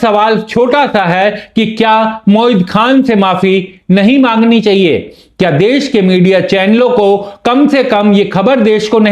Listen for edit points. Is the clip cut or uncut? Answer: uncut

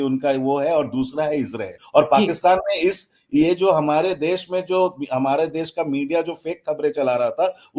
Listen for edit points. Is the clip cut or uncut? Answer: cut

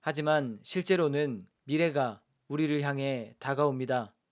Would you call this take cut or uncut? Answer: cut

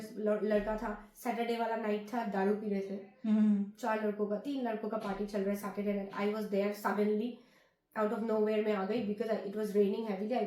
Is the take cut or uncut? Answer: uncut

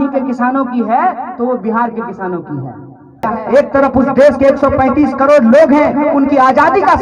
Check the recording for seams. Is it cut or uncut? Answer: cut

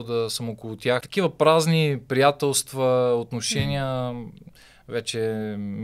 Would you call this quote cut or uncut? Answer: cut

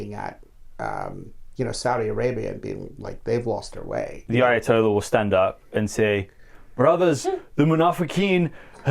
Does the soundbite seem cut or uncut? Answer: cut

